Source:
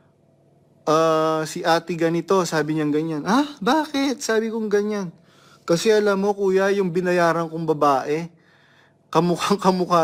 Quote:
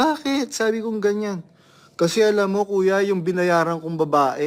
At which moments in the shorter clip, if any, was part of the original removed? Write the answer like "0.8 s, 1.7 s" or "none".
none